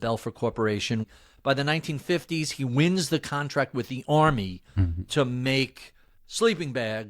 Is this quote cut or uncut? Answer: cut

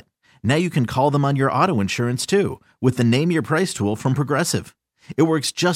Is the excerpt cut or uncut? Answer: uncut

